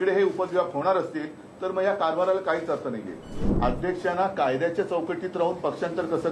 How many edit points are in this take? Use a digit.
1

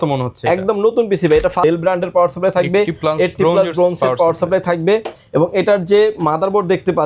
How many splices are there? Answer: 1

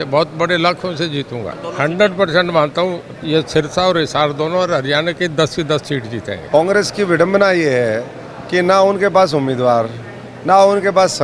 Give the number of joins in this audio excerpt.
2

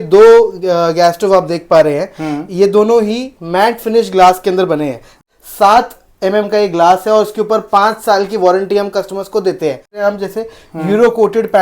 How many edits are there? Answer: 2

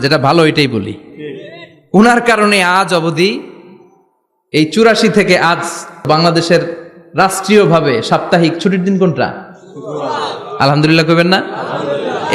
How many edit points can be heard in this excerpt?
1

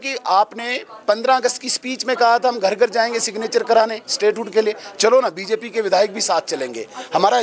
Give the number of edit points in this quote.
0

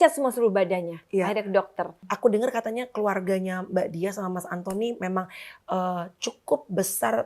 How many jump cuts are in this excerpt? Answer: 1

